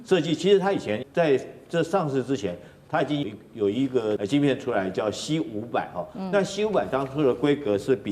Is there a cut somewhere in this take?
yes; 3 cuts; at 1.0 s, 3.2 s, 4.2 s

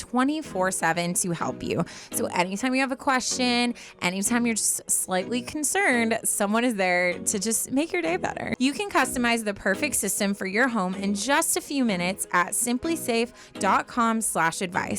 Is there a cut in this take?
yes; 1 cut; at 8.5 s

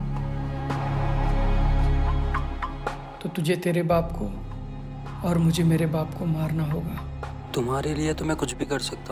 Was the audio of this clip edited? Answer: no; 0 cuts

